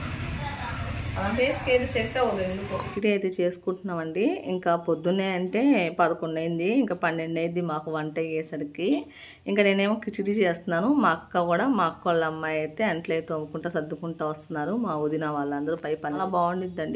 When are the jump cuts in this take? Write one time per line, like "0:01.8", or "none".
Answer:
0:02.9
0:16.2